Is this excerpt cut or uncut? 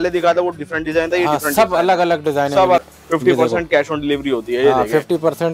cut